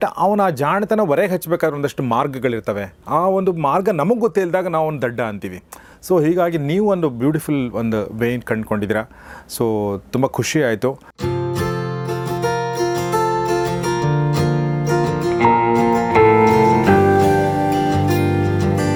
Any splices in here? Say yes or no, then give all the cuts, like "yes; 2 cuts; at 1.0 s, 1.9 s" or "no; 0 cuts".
no; 0 cuts